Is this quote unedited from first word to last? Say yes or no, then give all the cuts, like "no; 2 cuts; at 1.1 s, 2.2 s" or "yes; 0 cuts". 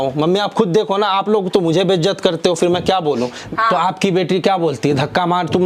no; 1 cut; at 3.4 s